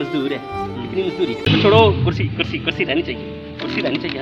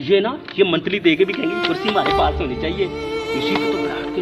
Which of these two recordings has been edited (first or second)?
first